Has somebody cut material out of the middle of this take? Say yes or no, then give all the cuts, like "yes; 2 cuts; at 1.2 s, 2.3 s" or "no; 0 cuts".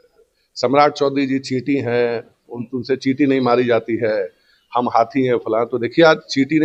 no; 0 cuts